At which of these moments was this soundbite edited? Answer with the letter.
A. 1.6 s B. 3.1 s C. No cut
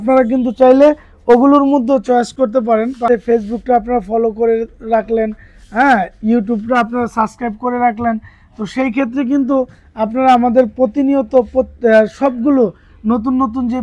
B